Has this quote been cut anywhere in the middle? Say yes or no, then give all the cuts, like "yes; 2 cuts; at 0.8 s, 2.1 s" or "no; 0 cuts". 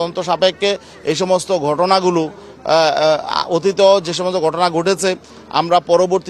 no; 0 cuts